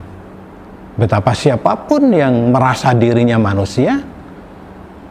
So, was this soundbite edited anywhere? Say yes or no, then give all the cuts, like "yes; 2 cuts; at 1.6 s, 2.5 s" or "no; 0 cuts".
no; 0 cuts